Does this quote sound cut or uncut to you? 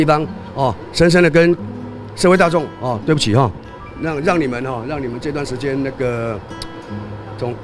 uncut